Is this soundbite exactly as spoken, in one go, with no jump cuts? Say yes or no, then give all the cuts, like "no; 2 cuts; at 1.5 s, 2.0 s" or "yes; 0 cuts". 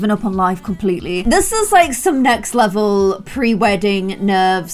no; 1 cut; at 1.2 s